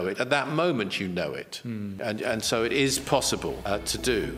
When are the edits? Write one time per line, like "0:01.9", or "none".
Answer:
0:01.9
0:03.6